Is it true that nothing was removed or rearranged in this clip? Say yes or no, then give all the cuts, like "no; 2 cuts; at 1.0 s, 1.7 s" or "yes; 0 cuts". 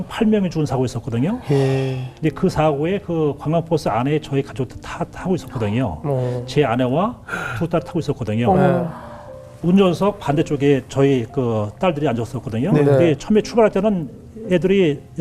no; 2 cuts; at 2.1 s, 9.4 s